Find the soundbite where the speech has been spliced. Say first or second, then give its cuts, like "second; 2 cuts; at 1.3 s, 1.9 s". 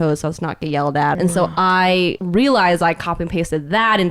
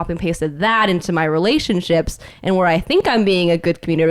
first; 2 cuts; at 1.1 s, 2.2 s